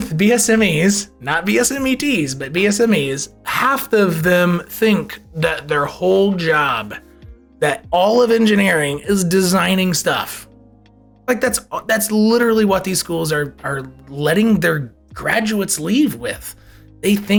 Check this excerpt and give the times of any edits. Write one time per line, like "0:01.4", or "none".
none